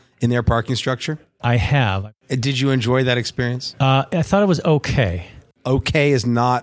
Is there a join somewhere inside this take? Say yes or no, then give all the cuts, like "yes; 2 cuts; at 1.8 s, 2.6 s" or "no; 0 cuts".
yes; 4 cuts; at 1.3 s, 2.2 s, 3.6 s, 5.5 s